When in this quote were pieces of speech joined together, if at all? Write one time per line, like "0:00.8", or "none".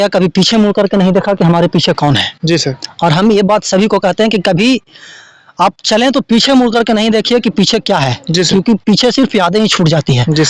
none